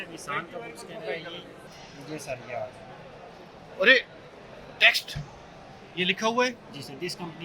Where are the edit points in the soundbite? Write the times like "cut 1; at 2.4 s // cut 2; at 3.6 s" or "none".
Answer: cut 1; at 1.6 s